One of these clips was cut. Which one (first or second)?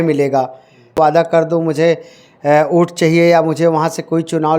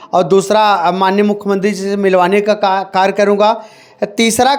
first